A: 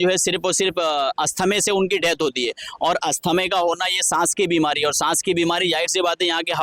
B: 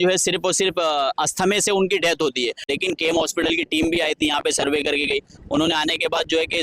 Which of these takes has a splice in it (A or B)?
B